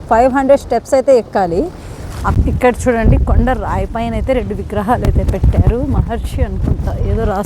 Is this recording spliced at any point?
yes; 1 cut; at 2.3 s

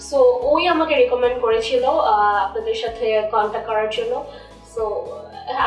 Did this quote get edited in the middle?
no; 0 cuts

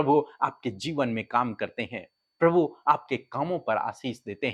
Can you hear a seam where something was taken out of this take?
no; 0 cuts

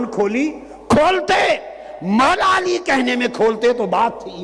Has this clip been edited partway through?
no; 0 cuts

